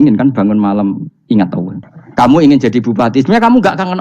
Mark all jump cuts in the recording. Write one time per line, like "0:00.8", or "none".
0:01.7